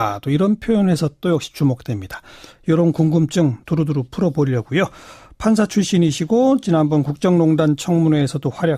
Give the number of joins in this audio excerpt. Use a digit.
0